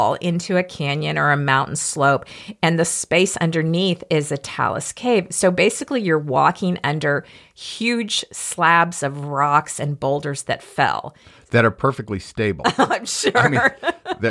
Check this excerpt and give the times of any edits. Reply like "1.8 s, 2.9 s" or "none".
none